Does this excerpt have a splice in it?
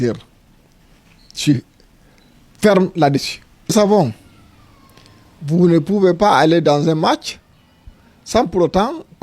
yes; 1 cut; at 3.7 s

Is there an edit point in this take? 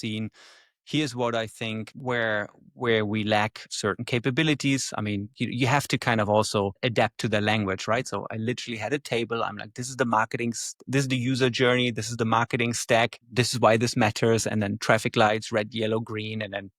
no; 0 cuts

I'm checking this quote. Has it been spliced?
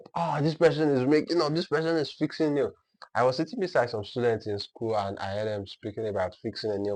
no; 0 cuts

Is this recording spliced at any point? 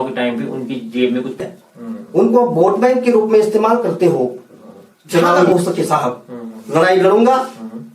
yes; 2 cuts; at 1.4 s, 5.5 s

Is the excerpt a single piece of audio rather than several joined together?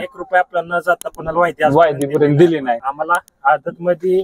no; 1 cut; at 2.8 s

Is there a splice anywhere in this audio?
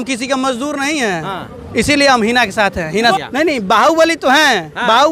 yes; 1 cut; at 2.9 s

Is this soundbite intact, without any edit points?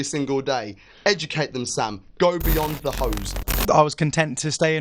no; 1 cut; at 3.5 s

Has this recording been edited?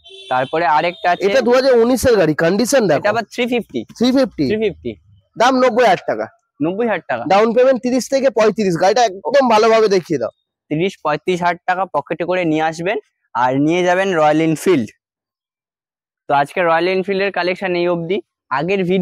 no; 0 cuts

